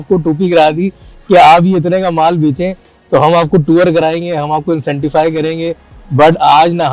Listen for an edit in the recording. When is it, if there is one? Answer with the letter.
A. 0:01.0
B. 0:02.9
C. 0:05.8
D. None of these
D